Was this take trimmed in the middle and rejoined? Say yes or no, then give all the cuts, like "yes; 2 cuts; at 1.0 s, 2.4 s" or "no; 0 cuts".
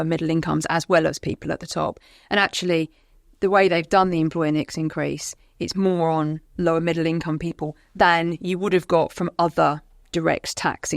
no; 0 cuts